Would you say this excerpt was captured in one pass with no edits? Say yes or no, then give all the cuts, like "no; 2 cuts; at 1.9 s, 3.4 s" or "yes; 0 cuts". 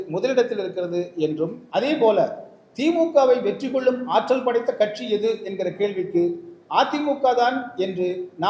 no; 1 cut; at 1.6 s